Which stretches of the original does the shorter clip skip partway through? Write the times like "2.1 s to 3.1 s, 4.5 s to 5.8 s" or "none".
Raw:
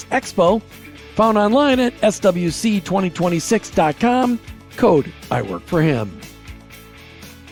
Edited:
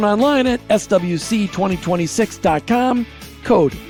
none